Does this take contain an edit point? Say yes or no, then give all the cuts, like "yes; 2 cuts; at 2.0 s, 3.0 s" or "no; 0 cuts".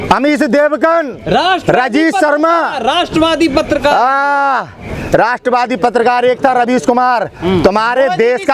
no; 0 cuts